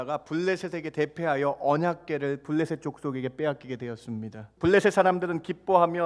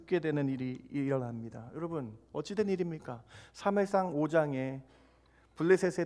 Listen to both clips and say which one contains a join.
first; 1 cut; at 4.4 s

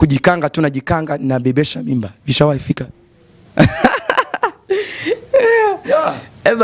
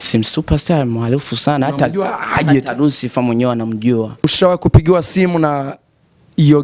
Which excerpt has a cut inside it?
second; 1 cut; at 4.2 s

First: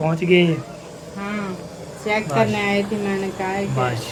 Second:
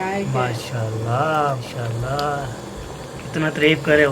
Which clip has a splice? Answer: second; 1 cut; at 1.6 s

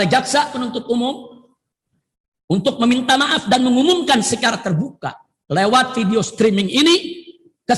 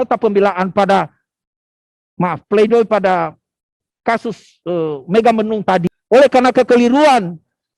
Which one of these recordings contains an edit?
second; 1 cut; at 5.9 s

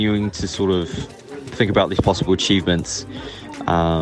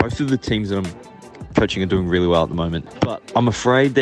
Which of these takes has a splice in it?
second; 1 cut; at 2.8 s

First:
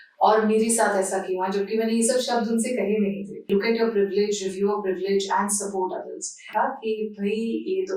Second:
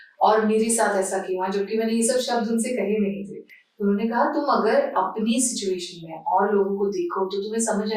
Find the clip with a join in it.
first; 2 cuts; at 3.4 s, 6.5 s

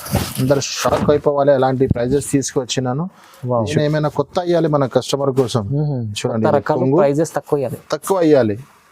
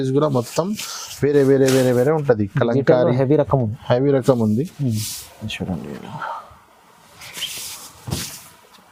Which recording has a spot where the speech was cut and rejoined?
first; 1 cut; at 3.7 s

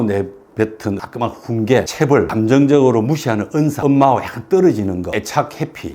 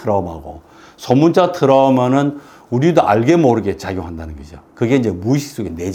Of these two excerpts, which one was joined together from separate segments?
first; 3 cuts; at 2.2 s, 3.8 s, 5.1 s

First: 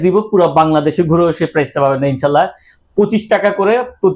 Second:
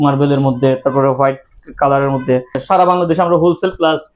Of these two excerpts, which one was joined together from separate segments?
second; 1 cut; at 2.6 s

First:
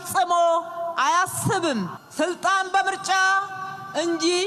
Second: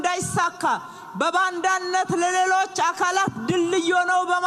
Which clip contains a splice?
first; 1 cut; at 2.0 s

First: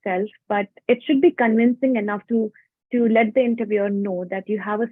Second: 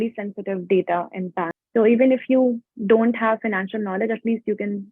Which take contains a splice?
second; 1 cut; at 1.6 s

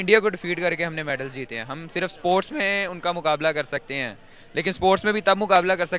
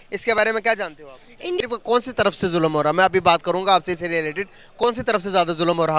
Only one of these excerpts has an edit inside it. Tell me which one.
second; 1 cut; at 1.6 s

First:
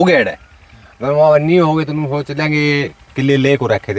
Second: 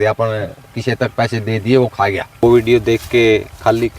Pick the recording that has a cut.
second; 1 cut; at 2.4 s

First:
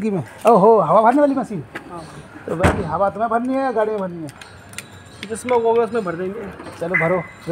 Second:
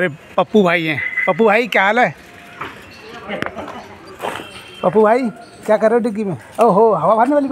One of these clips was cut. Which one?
second; 2 cuts; at 1.1 s, 3.4 s

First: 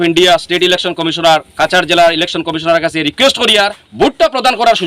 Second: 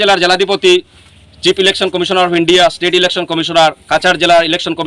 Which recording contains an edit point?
first; 1 cut; at 3.8 s

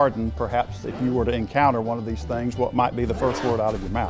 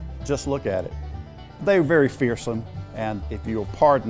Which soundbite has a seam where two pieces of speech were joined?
second; 2 cuts; at 1.1 s, 3.0 s

